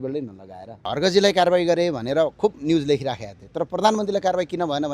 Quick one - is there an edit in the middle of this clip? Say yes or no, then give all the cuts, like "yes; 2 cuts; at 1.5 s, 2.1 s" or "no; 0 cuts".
yes; 1 cut; at 0.9 s